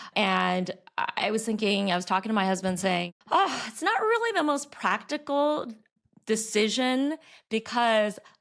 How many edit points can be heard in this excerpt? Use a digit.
1